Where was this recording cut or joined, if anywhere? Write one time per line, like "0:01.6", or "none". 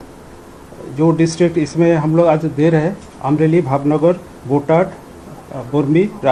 none

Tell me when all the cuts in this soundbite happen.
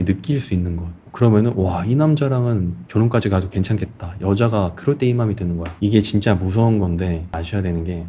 0:02.8
0:05.7

